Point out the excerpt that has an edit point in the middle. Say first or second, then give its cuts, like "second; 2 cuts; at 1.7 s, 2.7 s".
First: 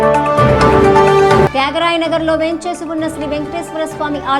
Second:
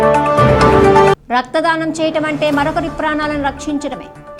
first; 1 cut; at 1.1 s